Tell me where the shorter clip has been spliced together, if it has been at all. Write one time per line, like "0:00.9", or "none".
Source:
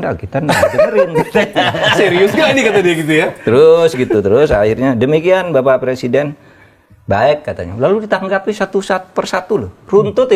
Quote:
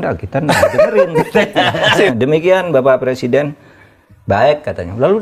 0:02.1